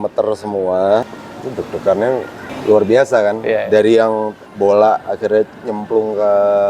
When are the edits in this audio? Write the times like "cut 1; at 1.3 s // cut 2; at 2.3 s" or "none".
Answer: cut 1; at 1.1 s // cut 2; at 2.5 s // cut 3; at 4.4 s